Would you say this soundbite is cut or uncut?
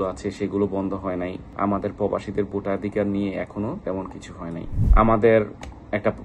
cut